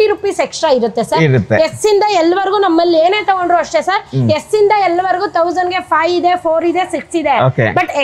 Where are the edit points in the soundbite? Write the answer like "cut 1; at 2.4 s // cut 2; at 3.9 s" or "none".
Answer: none